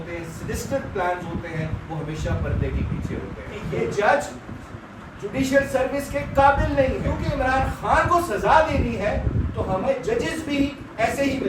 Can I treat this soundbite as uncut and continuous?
no; 2 cuts; at 3.5 s, 7.2 s

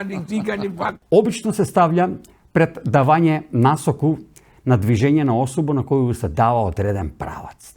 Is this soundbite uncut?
no; 1 cut; at 1.0 s

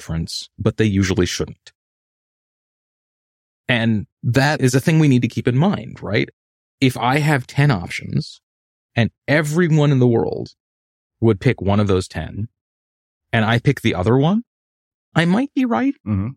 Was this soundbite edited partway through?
yes; 1 cut; at 15.1 s

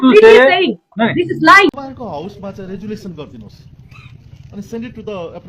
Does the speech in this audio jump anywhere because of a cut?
yes; 1 cut; at 1.8 s

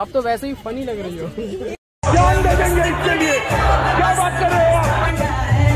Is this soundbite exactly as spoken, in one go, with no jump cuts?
yes; 0 cuts

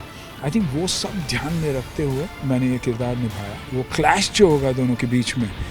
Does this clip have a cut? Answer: yes; 2 cuts; at 2.4 s, 3.7 s

